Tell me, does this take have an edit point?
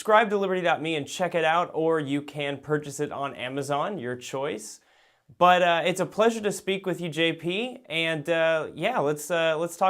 yes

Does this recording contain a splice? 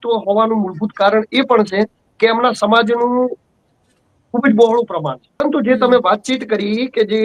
yes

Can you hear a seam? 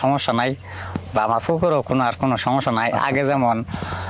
no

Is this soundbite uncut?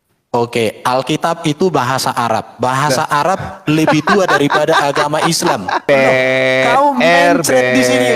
no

